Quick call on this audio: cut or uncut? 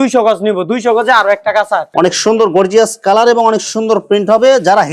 cut